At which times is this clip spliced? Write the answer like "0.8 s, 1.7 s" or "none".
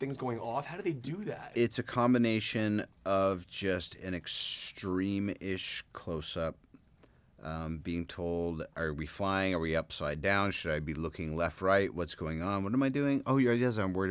12.0 s